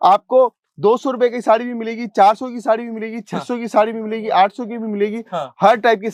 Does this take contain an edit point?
no; 0 cuts

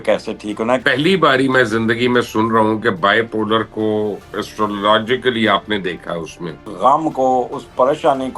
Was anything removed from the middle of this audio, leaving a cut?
yes; 2 cuts; at 0.8 s, 6.6 s

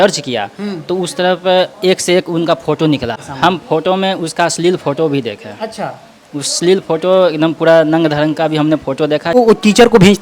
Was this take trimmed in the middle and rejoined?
yes; 2 cuts; at 3.2 s, 9.3 s

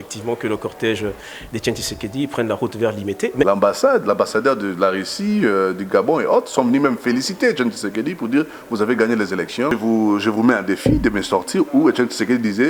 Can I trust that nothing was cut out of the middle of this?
no; 2 cuts; at 3.5 s, 9.8 s

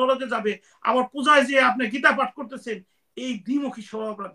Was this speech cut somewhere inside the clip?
no; 0 cuts

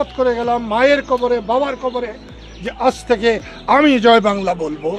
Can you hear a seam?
no; 0 cuts

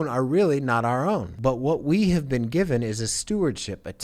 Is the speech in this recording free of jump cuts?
no; 1 cut; at 1.3 s

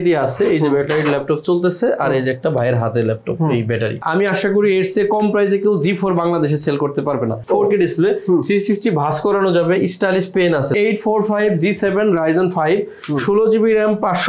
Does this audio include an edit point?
yes; 3 cuts; at 4.0 s, 7.4 s, 10.7 s

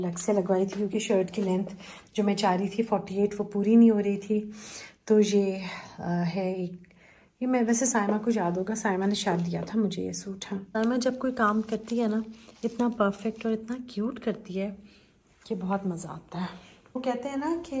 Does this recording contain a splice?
yes; 2 cuts; at 10.7 s, 17.0 s

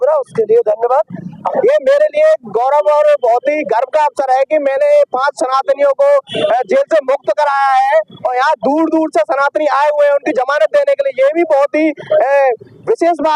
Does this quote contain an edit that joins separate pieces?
yes; 1 cut; at 1.5 s

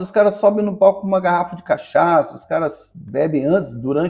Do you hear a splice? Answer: no; 0 cuts

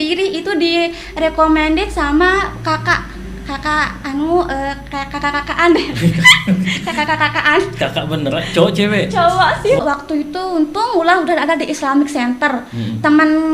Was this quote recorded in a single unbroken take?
no; 1 cut; at 9.8 s

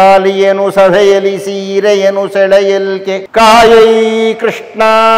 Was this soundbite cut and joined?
yes; 1 cut; at 3.2 s

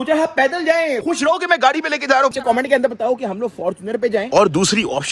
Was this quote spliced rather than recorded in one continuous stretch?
yes; 3 cuts; at 1.0 s, 2.4 s, 4.3 s

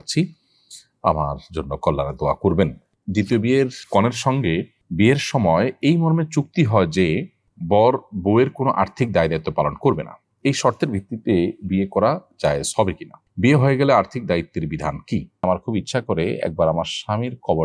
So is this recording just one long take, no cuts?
no; 2 cuts; at 2.8 s, 15.3 s

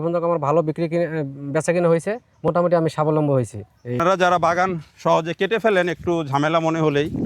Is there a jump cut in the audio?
yes; 1 cut; at 4.0 s

